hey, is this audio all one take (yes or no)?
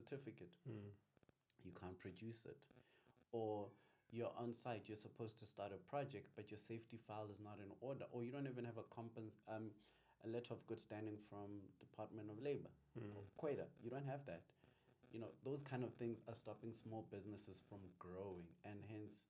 yes